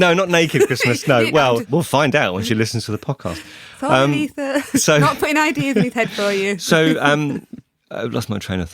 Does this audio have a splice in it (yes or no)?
yes